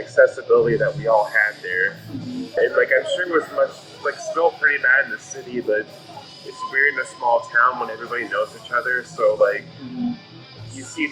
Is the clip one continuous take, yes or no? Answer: no